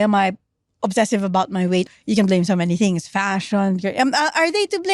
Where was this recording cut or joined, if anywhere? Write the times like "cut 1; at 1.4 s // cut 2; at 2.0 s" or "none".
cut 1; at 1.8 s